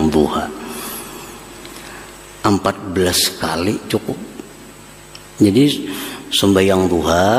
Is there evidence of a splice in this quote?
no; 0 cuts

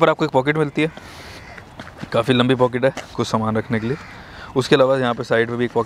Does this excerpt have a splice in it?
no; 0 cuts

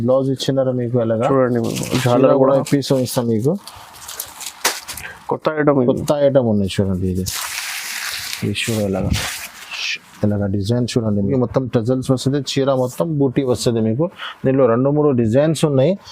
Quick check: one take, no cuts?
no; 1 cut; at 11.3 s

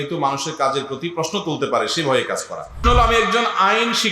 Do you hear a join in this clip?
yes; 1 cut; at 2.8 s

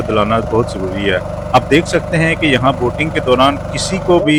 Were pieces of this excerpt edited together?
no; 0 cuts

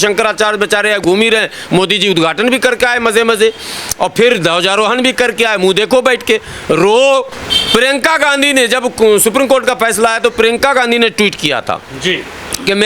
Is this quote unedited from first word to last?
yes; 0 cuts

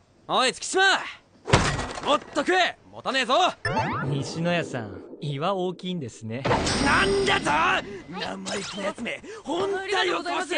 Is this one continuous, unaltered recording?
yes; 0 cuts

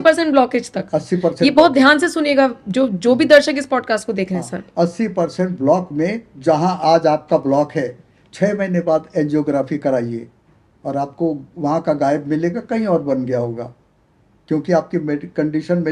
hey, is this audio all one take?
yes; 0 cuts

